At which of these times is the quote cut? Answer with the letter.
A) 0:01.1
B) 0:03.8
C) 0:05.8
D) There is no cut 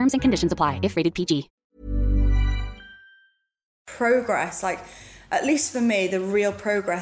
B